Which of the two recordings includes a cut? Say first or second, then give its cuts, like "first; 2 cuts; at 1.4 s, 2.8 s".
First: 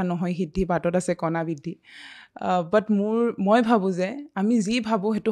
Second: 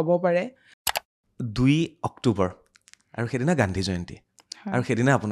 second; 1 cut; at 1.0 s